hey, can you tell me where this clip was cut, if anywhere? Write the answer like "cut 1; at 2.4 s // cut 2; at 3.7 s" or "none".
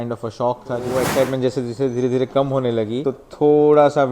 cut 1; at 0.9 s // cut 2; at 3.1 s